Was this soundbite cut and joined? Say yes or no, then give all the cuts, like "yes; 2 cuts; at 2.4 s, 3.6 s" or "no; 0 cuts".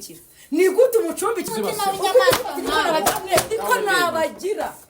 yes; 1 cut; at 1.5 s